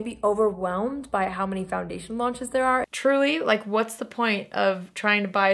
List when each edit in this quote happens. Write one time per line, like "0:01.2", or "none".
0:02.9